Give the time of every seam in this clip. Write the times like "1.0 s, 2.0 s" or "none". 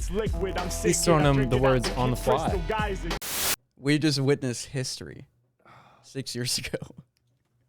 3.1 s